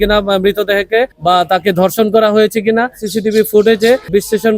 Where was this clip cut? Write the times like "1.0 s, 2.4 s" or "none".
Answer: 1.1 s, 3.0 s